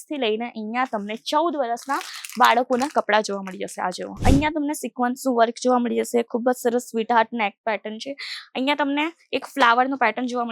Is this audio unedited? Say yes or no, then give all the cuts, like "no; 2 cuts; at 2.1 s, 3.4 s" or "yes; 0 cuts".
no; 1 cut; at 4.1 s